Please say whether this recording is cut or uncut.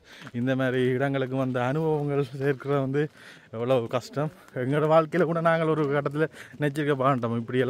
cut